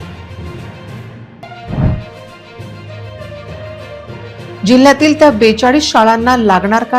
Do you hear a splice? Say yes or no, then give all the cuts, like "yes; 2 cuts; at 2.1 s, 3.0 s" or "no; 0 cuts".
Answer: yes; 1 cut; at 1.2 s